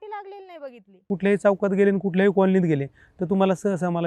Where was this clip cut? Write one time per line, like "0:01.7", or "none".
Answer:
0:01.1